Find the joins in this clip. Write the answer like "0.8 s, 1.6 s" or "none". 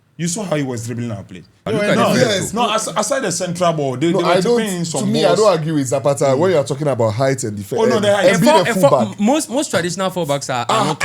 1.6 s